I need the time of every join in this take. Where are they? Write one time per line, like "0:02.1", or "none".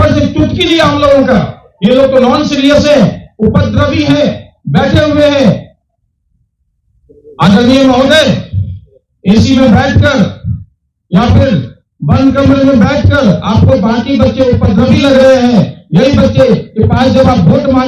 none